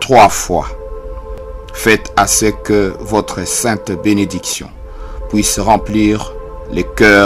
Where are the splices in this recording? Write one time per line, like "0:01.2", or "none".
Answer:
none